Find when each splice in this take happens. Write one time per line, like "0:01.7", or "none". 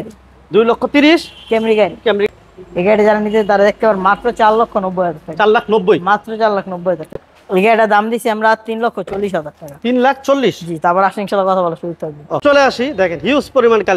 0:02.3
0:07.1
0:12.4